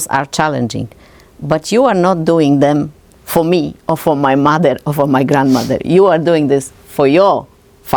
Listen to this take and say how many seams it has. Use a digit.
0